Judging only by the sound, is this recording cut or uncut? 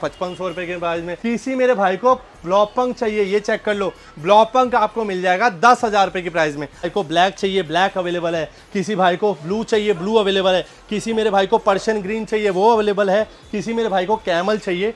cut